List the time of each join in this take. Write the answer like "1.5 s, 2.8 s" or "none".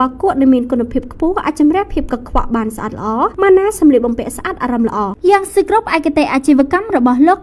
5.1 s